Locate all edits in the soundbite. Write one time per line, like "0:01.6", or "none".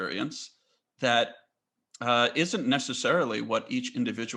none